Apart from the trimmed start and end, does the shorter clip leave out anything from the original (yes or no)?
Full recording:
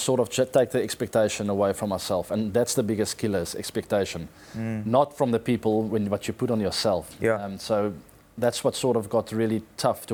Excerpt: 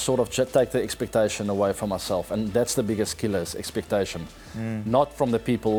no